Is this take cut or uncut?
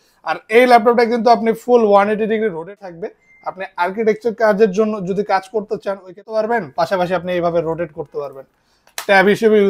cut